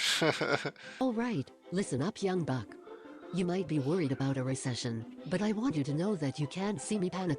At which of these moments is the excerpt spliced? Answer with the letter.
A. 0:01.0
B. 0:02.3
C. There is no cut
A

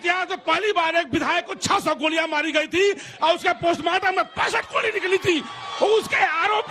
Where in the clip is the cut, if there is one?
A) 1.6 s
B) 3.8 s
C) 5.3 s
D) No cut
D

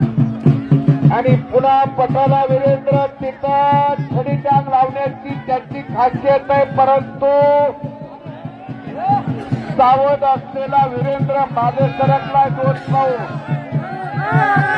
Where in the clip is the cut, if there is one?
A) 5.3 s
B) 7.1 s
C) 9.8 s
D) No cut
D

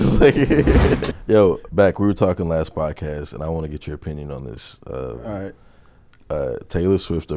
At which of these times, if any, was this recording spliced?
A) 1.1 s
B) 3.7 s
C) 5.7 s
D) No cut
A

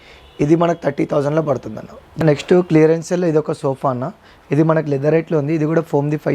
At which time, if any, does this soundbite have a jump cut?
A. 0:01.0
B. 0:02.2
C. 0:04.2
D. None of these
B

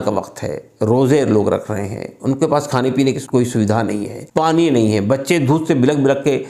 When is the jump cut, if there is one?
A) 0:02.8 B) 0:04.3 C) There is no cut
C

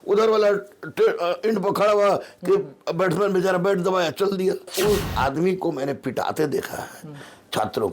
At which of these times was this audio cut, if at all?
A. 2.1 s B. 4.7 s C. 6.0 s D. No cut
B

